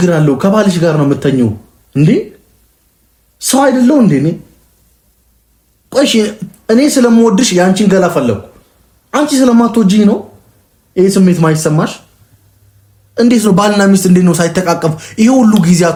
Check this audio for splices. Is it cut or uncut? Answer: uncut